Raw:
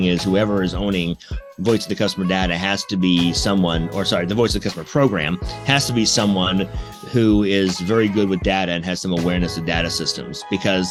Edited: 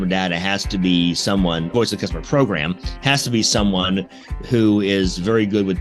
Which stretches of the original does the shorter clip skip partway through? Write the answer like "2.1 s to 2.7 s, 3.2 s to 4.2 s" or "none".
3.9 s to 4.3 s